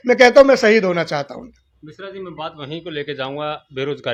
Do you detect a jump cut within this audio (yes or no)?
no